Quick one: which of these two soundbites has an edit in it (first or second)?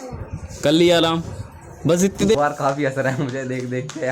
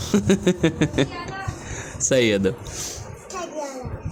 first